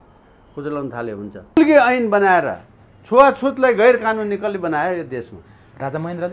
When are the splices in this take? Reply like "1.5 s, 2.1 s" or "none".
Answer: 1.6 s

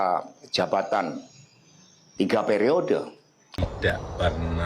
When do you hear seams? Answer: 3.6 s

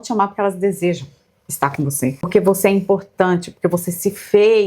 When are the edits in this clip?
2.3 s

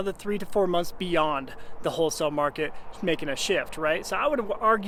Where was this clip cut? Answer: none

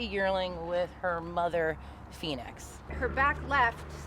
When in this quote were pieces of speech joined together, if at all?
2.8 s

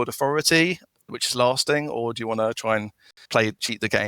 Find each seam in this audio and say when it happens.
1.1 s, 3.2 s

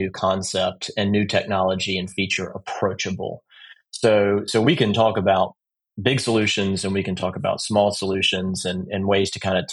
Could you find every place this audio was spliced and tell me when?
none

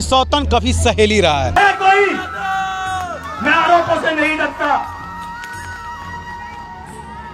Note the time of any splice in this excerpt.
1.6 s

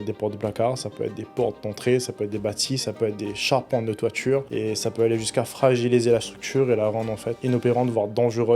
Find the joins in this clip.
4.5 s, 7.3 s

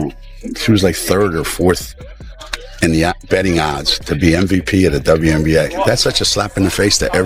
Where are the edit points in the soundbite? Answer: none

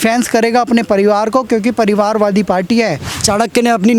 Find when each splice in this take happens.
3.1 s

